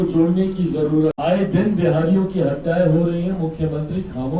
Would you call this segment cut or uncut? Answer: cut